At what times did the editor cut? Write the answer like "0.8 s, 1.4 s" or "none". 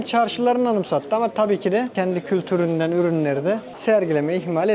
1.9 s, 3.7 s